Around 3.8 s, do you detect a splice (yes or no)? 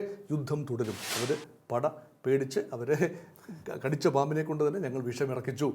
no